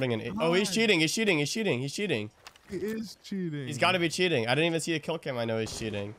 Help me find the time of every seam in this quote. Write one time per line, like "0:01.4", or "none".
none